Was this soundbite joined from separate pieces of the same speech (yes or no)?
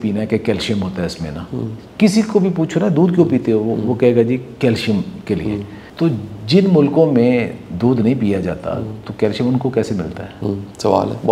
no